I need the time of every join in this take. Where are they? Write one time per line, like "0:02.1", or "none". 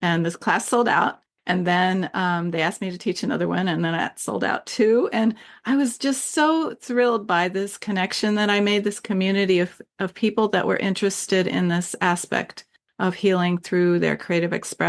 none